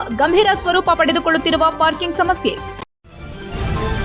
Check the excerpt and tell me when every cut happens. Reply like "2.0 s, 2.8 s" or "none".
2.7 s

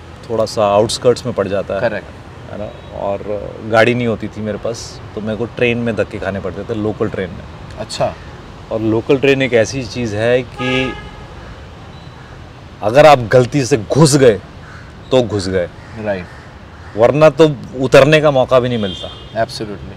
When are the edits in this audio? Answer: none

